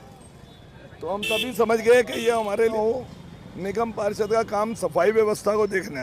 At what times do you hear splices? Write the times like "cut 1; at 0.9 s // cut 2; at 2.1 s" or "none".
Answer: cut 1; at 2.7 s